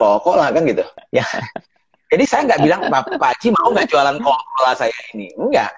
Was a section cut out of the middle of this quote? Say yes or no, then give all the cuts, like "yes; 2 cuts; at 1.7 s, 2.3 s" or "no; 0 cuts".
yes; 1 cut; at 1.0 s